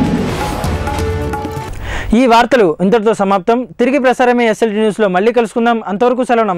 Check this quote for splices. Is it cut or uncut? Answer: uncut